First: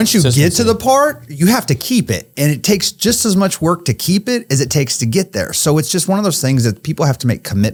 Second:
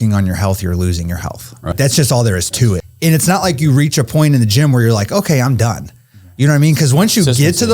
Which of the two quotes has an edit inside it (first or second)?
second